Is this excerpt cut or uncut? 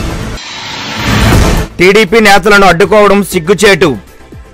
cut